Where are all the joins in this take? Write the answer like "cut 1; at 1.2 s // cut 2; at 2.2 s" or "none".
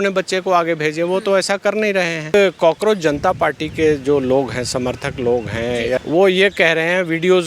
cut 1; at 2.3 s // cut 2; at 6.0 s